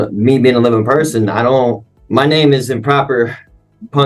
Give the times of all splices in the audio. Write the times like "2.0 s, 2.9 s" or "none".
1.9 s